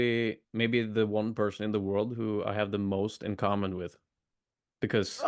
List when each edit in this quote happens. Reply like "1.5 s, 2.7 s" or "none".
none